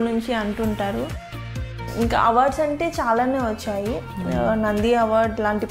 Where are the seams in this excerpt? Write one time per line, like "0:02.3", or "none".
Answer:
0:01.7